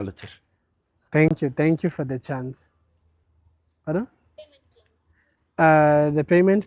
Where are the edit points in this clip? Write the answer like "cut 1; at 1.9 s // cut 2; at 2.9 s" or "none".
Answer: none